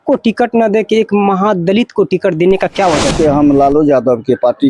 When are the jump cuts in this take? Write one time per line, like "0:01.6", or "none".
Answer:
0:03.2